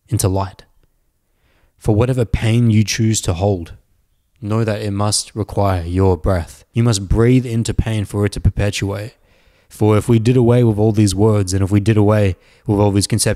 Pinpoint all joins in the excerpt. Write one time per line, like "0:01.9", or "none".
0:06.6